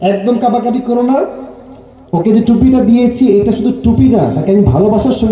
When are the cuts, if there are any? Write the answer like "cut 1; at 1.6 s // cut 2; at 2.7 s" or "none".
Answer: none